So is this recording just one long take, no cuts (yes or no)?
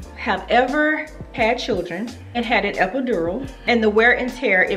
no